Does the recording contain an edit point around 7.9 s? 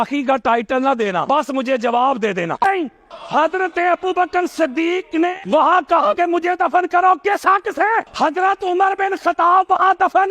no; 1 cut; at 2.6 s

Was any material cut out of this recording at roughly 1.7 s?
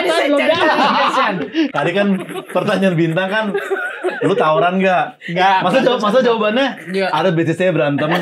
yes; 1 cut; at 1.7 s

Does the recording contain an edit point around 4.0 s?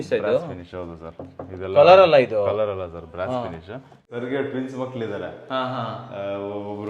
yes; 1 cut; at 4.0 s

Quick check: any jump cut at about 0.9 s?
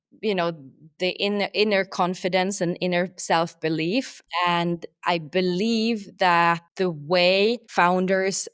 yes; 4 cuts; at 0.9 s, 4.2 s, 6.7 s, 7.6 s

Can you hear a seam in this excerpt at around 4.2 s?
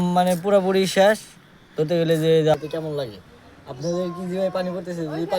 no; 1 cut; at 2.5 s

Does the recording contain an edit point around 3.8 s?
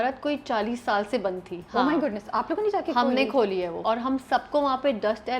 yes; 1 cut; at 3.8 s

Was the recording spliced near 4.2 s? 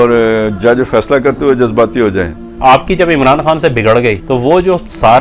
yes; 2 cuts; at 2.5 s, 4.2 s

